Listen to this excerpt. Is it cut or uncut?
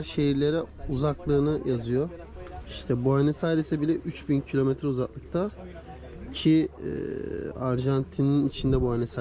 uncut